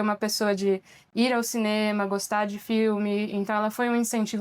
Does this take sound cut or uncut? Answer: uncut